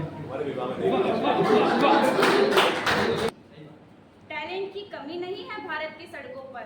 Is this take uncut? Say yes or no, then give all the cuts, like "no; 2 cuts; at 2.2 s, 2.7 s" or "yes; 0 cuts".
no; 1 cut; at 3.3 s